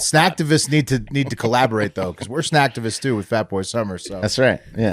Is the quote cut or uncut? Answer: uncut